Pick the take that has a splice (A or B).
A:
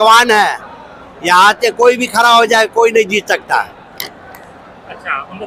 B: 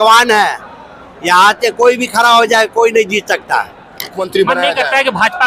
B